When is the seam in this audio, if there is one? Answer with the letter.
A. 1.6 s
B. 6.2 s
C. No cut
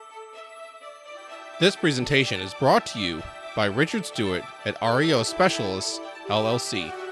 A